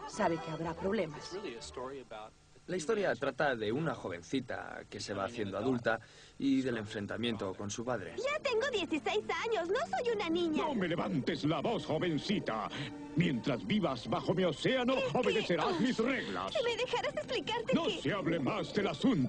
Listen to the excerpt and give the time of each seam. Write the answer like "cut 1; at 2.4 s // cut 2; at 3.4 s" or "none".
cut 1; at 15.6 s